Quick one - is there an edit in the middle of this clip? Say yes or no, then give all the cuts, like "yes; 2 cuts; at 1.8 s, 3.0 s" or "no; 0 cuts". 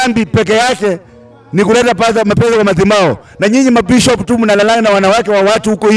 no; 0 cuts